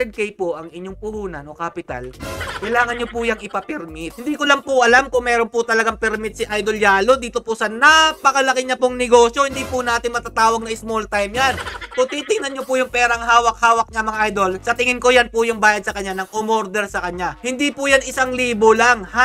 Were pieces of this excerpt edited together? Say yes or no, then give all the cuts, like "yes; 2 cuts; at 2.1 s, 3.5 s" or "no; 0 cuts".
no; 0 cuts